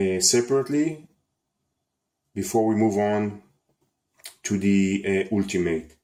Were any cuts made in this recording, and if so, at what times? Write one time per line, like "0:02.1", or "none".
none